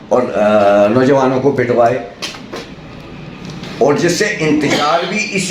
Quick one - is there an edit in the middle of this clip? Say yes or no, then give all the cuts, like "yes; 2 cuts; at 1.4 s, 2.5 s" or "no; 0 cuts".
no; 0 cuts